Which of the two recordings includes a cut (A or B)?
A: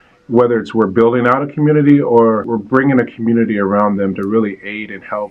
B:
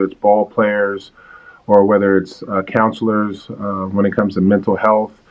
A